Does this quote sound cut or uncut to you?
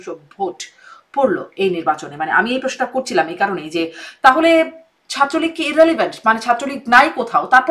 uncut